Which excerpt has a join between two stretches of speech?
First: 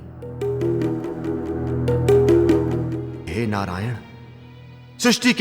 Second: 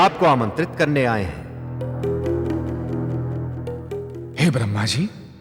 first; 1 cut; at 3.3 s

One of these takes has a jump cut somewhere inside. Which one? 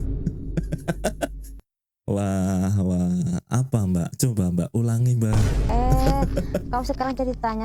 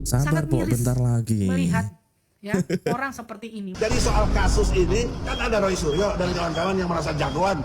second; 1 cut; at 3.7 s

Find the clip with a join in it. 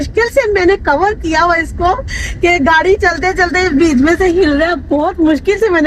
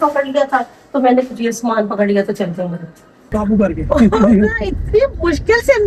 second; 1 cut; at 3.3 s

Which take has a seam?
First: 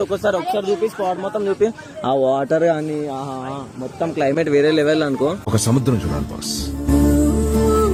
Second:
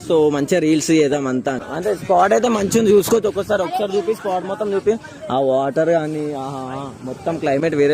second; 1 cut; at 1.6 s

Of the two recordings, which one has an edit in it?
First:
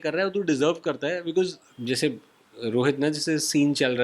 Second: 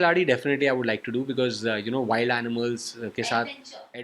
first; 1 cut; at 1.6 s

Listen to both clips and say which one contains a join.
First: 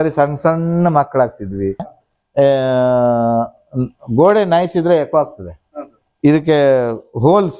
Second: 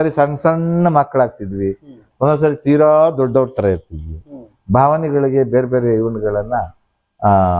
first; 1 cut; at 2.0 s

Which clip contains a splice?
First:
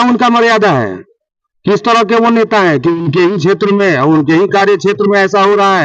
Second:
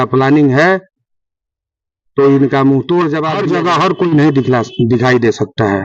second; 1 cut; at 3.3 s

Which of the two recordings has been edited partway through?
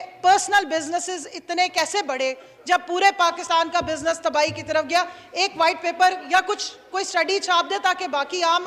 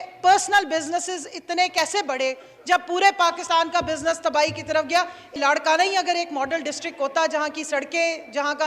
second; 1 cut; at 5.4 s

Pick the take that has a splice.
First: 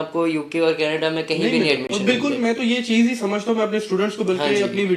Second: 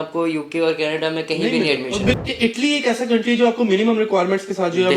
second; 1 cut; at 2.2 s

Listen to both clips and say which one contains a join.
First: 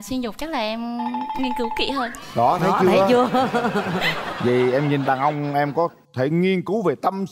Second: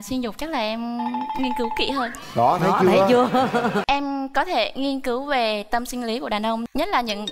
second; 1 cut; at 3.8 s

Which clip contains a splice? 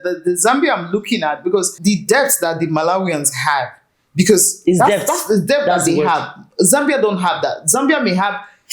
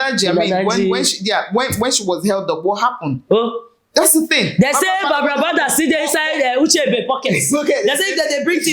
first; 1 cut; at 1.7 s

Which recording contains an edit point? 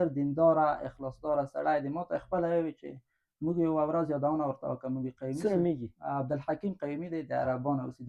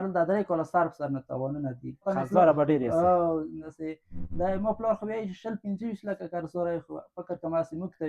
second; 2 cuts; at 2.0 s, 3.7 s

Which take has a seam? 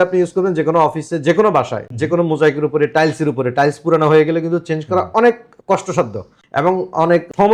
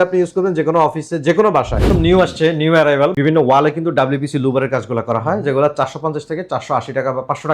second; 2 cuts; at 1.9 s, 3.1 s

